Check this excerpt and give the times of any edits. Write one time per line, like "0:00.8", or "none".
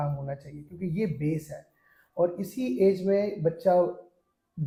none